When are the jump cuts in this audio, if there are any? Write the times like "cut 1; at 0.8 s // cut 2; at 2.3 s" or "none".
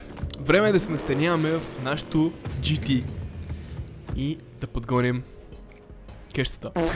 none